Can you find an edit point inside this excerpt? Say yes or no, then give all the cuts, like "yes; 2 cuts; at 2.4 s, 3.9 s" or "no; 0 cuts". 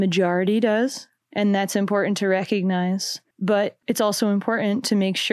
no; 0 cuts